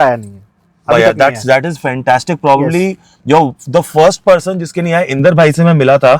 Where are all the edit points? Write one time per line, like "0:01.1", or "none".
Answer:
none